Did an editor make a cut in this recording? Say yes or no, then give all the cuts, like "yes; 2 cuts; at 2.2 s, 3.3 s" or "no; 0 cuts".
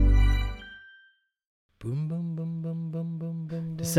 yes; 1 cut; at 1.6 s